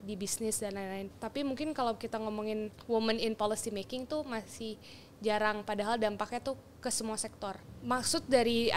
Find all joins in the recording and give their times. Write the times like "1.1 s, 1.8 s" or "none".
1.1 s, 2.8 s, 7.7 s

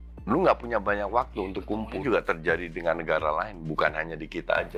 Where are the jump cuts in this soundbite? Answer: 1.9 s

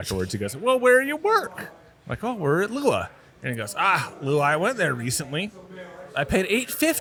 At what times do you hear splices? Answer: none

